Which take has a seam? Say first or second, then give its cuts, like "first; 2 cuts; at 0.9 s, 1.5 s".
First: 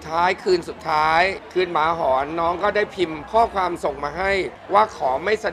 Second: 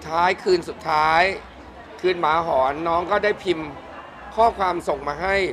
first; 3 cuts; at 1.4 s, 3.2 s, 4.6 s